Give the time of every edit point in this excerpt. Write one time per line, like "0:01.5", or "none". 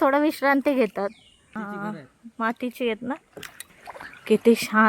0:01.5
0:03.8